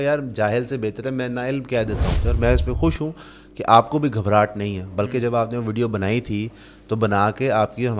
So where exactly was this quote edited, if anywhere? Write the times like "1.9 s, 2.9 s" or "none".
2.2 s